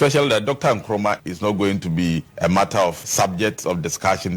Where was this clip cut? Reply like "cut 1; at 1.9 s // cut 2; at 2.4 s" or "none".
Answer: cut 1; at 2.3 s // cut 2; at 3.0 s

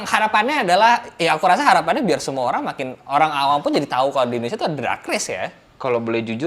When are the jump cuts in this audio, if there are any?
none

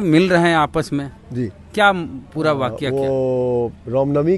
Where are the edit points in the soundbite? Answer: none

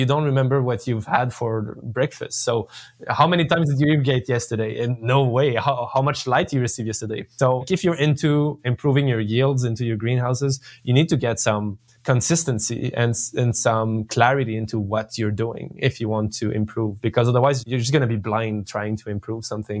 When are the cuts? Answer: cut 1; at 7.6 s // cut 2; at 17.6 s

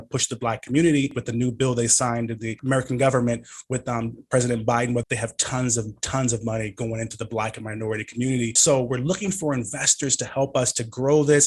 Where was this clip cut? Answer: cut 1; at 1.2 s // cut 2; at 2.5 s // cut 3; at 5.0 s // cut 4; at 8.6 s

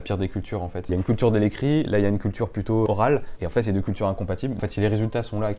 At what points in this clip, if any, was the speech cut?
cut 1; at 0.9 s // cut 2; at 3.0 s // cut 3; at 4.6 s

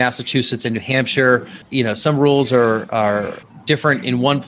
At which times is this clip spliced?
none

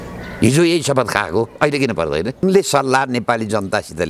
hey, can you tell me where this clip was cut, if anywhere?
cut 1; at 2.4 s

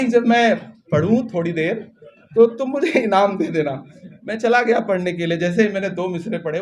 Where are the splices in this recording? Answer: none

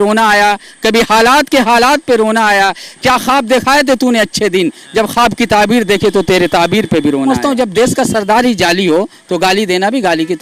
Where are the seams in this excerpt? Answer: cut 1; at 7.3 s

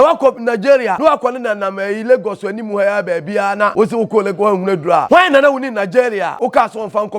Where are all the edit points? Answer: cut 1; at 1.0 s // cut 2; at 3.7 s // cut 3; at 5.0 s // cut 4; at 6.3 s

